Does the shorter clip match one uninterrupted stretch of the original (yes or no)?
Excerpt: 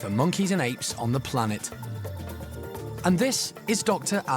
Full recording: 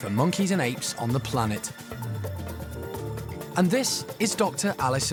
no